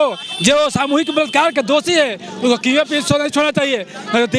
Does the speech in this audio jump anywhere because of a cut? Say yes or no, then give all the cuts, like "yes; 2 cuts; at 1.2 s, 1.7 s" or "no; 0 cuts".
no; 0 cuts